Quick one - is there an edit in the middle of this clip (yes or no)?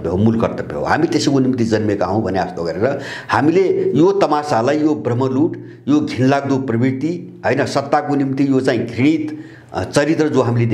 no